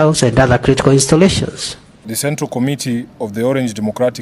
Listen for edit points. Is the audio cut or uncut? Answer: cut